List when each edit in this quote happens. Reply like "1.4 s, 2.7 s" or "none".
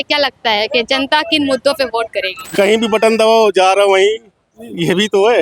2.4 s